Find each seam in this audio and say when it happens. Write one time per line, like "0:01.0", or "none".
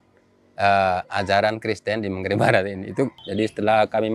0:03.2